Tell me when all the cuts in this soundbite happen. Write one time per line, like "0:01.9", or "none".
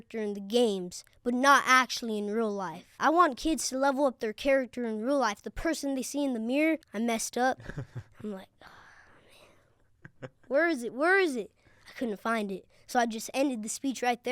0:03.0
0:06.9